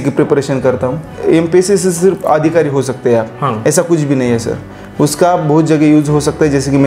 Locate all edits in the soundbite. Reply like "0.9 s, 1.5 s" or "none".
1.1 s